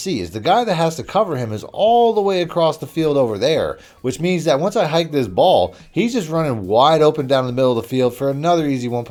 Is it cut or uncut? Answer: uncut